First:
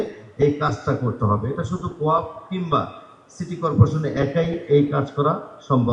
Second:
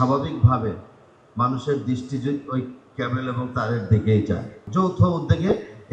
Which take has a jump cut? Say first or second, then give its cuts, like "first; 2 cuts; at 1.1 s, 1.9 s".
second; 1 cut; at 4.6 s